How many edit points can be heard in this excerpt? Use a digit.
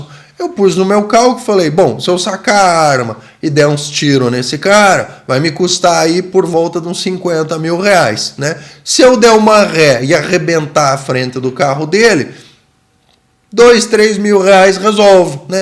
0